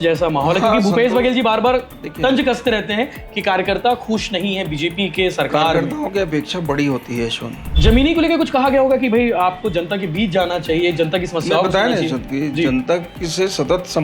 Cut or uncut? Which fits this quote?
cut